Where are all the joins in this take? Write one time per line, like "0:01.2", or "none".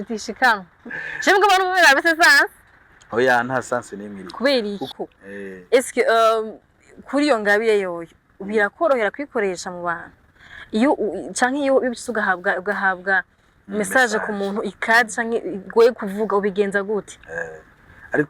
0:04.9

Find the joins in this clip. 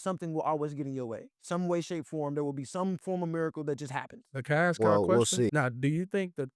0:04.3
0:05.5

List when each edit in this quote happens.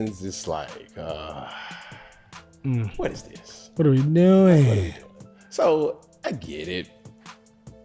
0:06.9

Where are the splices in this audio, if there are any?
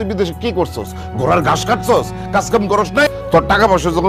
none

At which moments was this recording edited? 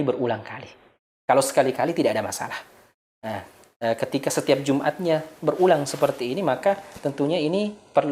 none

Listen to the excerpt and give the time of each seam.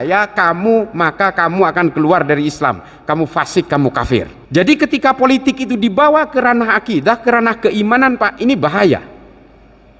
0:04.4

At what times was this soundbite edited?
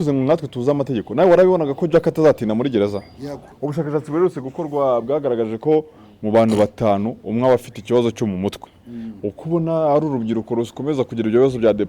0:03.5

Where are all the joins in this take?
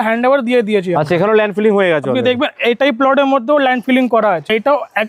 none

